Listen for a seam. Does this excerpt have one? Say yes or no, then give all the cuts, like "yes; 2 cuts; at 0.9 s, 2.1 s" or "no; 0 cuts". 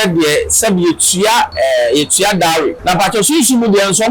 yes; 2 cuts; at 1.5 s, 2.8 s